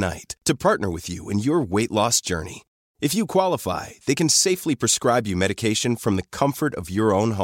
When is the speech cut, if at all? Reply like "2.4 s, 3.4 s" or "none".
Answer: none